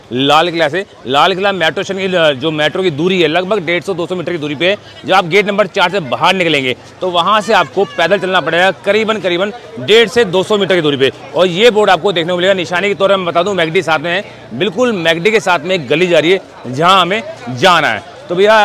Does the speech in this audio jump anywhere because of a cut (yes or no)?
no